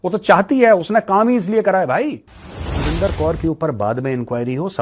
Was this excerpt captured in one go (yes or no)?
no